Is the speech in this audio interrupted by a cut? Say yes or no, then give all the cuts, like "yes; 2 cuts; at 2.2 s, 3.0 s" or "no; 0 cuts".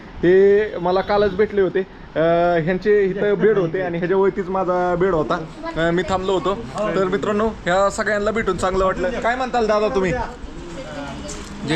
no; 0 cuts